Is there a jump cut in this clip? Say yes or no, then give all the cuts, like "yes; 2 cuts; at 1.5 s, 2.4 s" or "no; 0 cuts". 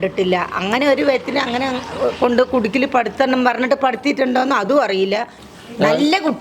yes; 1 cut; at 5.4 s